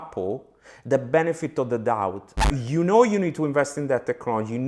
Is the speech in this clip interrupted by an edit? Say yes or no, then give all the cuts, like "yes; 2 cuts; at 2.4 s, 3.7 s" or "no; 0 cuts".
yes; 1 cut; at 2.5 s